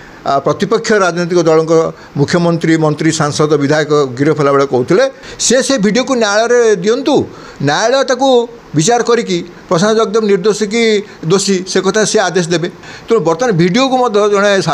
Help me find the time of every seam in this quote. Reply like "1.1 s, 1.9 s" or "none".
5.3 s, 12.9 s

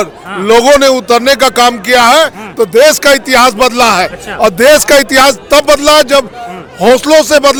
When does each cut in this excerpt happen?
none

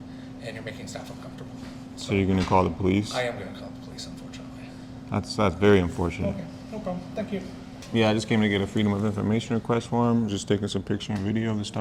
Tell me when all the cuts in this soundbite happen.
7.7 s

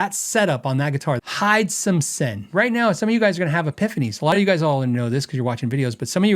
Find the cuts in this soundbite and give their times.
1.2 s, 2.5 s

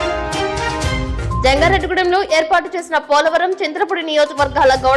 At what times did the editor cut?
1.4 s

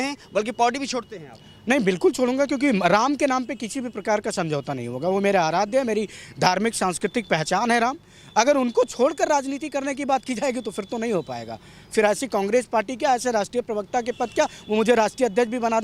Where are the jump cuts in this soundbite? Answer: none

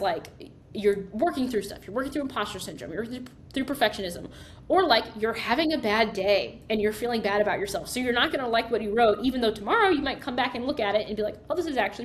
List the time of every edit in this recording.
none

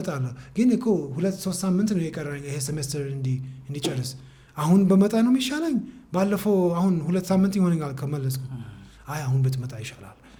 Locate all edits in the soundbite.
none

